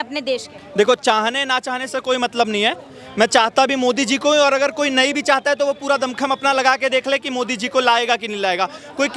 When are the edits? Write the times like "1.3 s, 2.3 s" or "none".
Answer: none